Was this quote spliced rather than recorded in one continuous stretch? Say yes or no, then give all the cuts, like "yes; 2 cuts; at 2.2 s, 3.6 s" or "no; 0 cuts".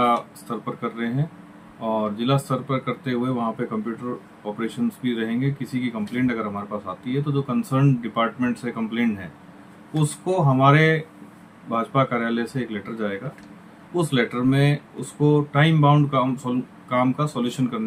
no; 0 cuts